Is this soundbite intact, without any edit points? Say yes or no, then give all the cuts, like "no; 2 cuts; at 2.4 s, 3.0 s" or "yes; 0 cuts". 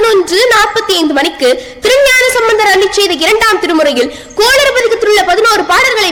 yes; 0 cuts